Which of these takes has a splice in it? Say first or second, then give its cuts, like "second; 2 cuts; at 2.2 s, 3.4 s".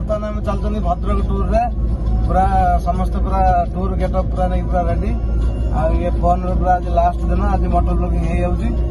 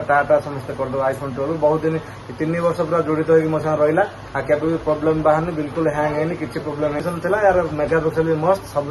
second; 1 cut; at 7.0 s